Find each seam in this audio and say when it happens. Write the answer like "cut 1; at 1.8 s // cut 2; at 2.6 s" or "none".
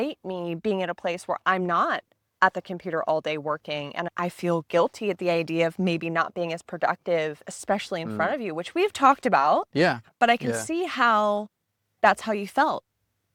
none